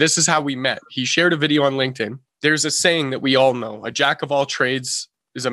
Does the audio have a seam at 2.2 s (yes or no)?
yes